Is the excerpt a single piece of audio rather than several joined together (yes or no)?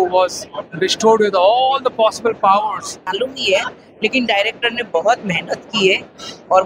no